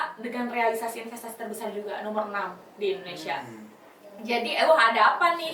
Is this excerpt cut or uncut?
uncut